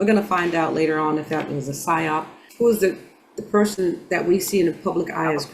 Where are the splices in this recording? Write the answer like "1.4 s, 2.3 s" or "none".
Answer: 2.4 s

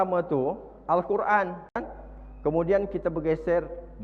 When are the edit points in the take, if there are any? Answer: 2.0 s

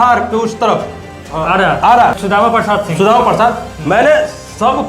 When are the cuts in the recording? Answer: 2.2 s

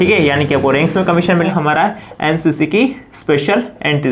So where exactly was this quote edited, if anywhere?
1.3 s

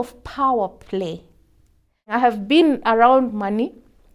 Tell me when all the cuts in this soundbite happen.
2.0 s

